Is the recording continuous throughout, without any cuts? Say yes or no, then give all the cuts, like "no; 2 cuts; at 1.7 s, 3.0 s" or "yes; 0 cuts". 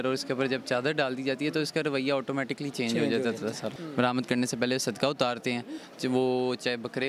no; 1 cut; at 3.7 s